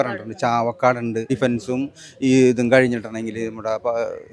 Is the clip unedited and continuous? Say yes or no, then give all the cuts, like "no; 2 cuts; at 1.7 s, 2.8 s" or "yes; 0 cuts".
no; 1 cut; at 1.2 s